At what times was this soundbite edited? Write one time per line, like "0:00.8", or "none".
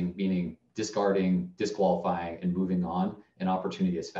none